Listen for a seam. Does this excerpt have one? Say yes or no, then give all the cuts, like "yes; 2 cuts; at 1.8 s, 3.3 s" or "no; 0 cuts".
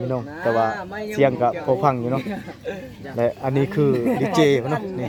no; 0 cuts